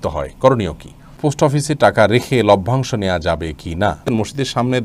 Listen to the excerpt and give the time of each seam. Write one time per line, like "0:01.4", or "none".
0:01.2
0:04.0